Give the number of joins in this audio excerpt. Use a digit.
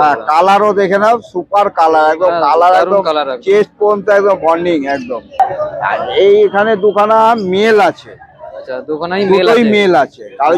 1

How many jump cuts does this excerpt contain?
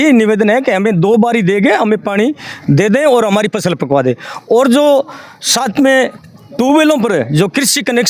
0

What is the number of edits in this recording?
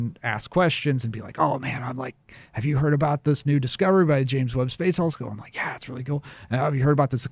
0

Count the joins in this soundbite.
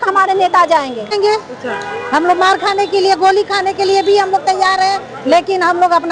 1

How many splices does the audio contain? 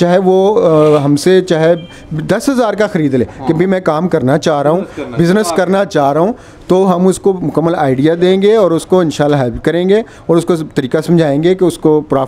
0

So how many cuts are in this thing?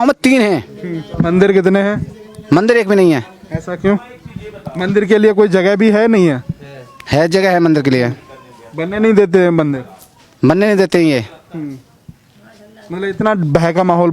0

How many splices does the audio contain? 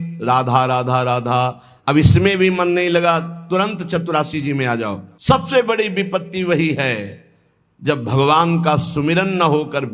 1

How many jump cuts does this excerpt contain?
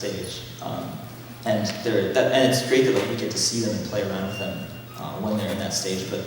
1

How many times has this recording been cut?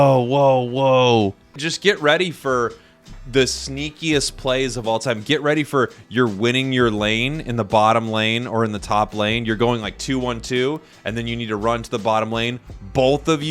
1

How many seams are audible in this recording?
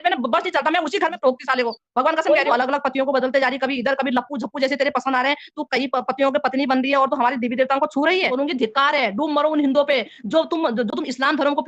2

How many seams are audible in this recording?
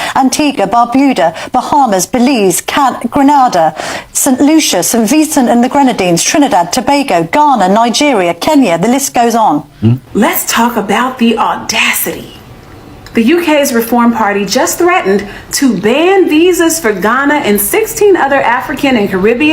1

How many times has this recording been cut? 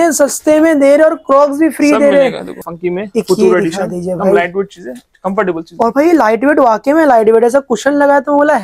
1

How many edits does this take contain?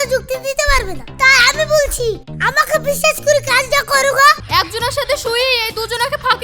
1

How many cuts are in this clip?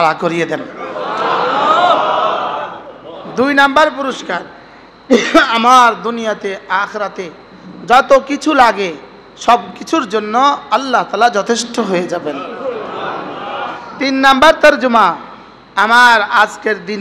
1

